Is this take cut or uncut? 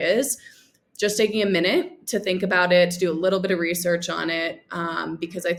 uncut